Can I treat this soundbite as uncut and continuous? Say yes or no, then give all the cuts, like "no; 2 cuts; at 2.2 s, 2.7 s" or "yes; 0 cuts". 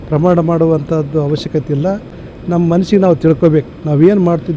yes; 0 cuts